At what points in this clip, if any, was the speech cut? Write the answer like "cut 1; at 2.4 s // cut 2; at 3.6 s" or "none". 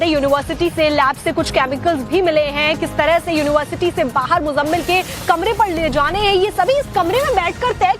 none